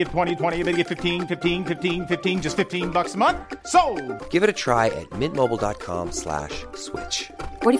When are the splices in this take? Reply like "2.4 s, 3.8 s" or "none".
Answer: none